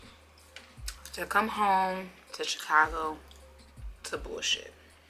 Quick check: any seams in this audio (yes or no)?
no